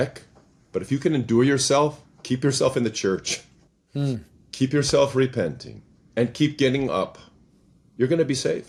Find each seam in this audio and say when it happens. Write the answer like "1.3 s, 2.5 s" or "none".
none